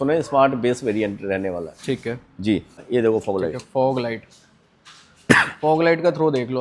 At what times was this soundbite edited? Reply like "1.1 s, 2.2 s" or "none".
2.8 s

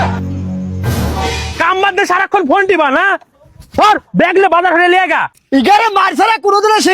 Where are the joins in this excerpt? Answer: none

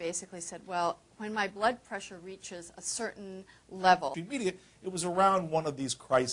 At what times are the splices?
none

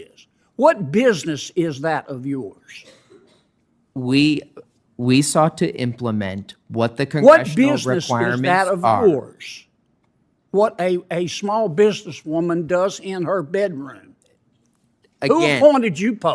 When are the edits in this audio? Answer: none

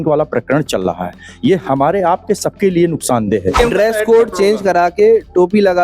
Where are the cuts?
3.6 s

